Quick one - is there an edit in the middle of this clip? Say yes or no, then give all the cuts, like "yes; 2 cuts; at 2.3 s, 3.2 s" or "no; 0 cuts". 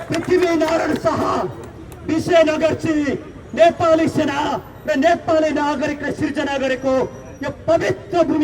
no; 0 cuts